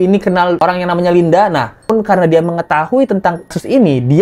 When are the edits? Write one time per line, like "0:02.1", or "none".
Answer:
0:01.9